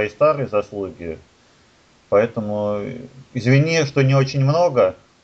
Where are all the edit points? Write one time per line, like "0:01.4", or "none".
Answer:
none